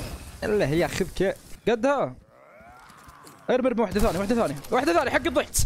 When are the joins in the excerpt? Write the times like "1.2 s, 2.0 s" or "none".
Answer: 1.5 s